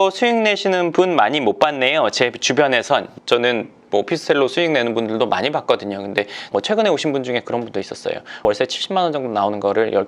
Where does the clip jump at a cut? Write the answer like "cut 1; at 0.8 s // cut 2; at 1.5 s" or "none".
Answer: cut 1; at 3.1 s // cut 2; at 6.4 s // cut 3; at 8.4 s